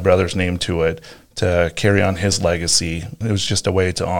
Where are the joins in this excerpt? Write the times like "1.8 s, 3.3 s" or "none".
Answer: 3.2 s